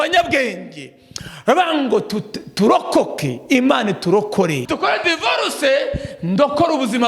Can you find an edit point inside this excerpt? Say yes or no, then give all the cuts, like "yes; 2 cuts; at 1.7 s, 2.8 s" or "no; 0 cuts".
yes; 1 cut; at 4.7 s